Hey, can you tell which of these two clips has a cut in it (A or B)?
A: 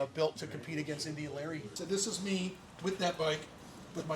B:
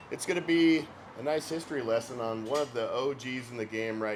A